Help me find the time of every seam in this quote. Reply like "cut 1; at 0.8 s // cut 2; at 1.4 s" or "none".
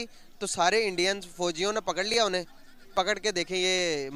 none